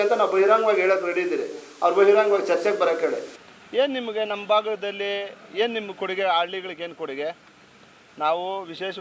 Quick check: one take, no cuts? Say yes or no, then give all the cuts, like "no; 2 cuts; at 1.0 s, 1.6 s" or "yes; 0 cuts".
no; 1 cut; at 3.3 s